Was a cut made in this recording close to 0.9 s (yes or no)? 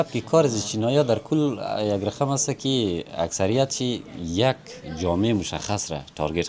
no